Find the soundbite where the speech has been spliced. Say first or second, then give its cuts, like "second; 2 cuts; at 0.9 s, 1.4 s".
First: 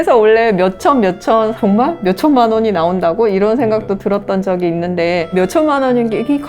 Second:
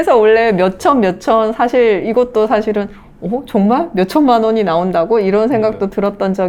first; 2 cuts; at 1.5 s, 5.3 s